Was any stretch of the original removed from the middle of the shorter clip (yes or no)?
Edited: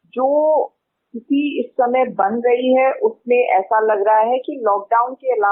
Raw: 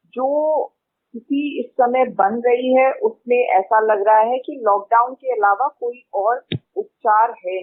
no